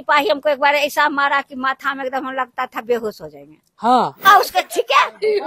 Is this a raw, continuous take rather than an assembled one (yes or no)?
no